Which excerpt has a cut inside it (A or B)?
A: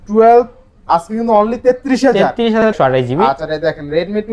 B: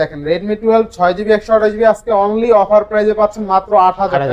A